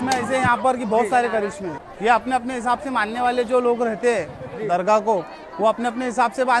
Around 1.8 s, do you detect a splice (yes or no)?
yes